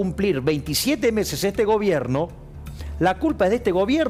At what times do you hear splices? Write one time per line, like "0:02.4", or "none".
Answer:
none